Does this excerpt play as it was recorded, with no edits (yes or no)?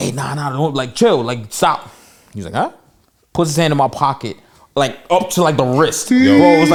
yes